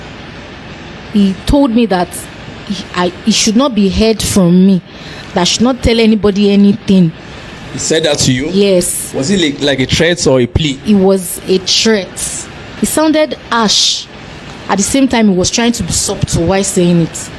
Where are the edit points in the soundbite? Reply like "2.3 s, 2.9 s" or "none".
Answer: 12.6 s